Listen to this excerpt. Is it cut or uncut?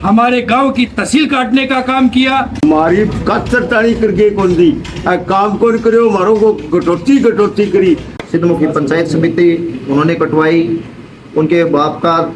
cut